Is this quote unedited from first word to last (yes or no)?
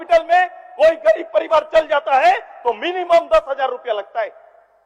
yes